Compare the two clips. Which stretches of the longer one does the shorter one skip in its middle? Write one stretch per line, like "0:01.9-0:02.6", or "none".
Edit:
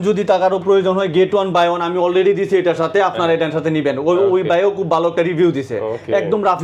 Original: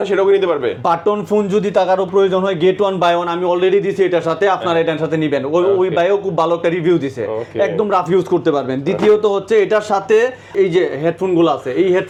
none